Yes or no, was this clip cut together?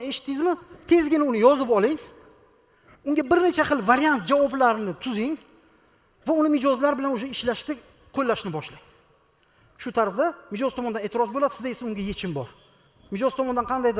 no